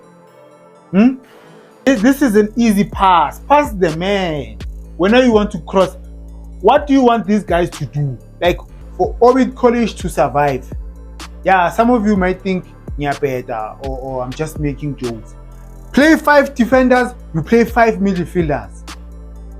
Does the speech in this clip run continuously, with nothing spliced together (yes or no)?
no